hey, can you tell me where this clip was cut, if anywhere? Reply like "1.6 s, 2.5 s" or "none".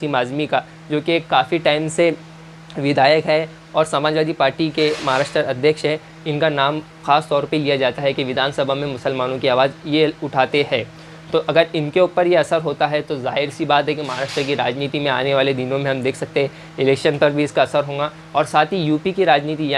none

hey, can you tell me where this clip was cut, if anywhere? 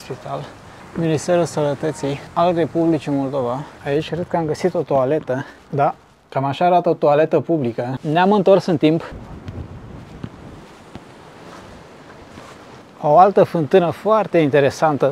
3.8 s, 6.1 s, 12.9 s

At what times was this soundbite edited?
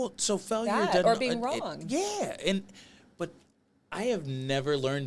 none

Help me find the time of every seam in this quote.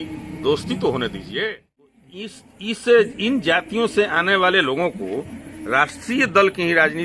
2.1 s

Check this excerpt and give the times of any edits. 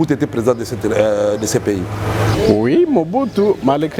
2.3 s

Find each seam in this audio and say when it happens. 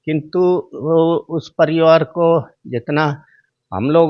none

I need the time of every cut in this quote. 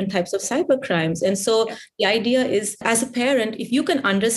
2.8 s

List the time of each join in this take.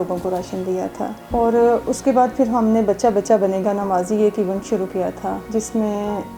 5.4 s

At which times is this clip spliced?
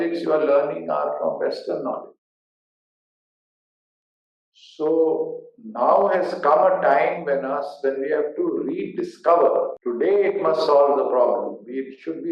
9.7 s

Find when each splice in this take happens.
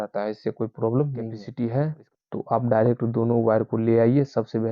1.4 s

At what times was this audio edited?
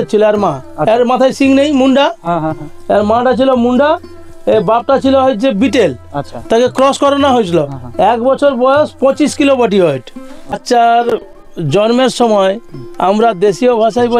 10.6 s

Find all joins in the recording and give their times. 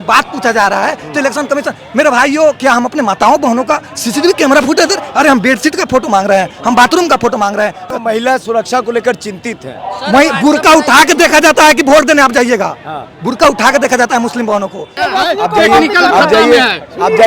7.9 s, 14.9 s

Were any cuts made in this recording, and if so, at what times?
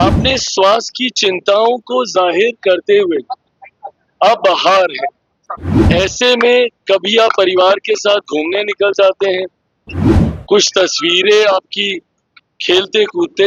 none

